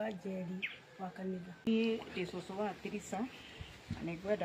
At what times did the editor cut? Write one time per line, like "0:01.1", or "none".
0:01.7